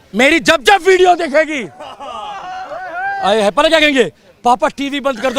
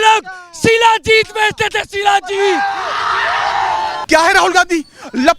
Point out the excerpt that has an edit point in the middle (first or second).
second